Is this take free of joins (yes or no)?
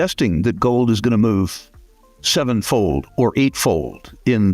yes